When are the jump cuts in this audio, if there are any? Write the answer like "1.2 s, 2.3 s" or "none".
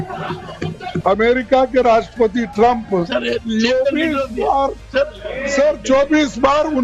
1.0 s